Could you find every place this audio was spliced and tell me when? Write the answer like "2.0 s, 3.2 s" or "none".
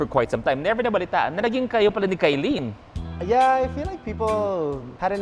none